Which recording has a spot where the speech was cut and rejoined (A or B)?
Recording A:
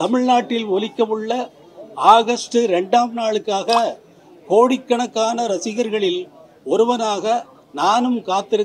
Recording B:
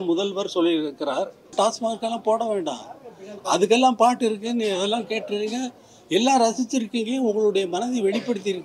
B